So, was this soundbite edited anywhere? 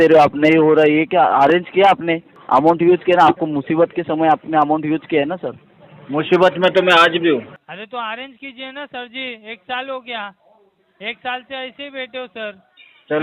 yes; 2 cuts; at 2.3 s, 7.6 s

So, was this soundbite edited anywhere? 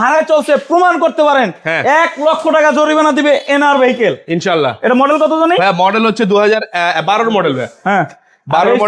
no; 0 cuts

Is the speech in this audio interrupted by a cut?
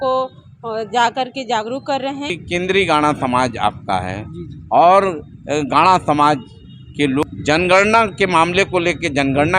yes; 2 cuts; at 2.3 s, 7.3 s

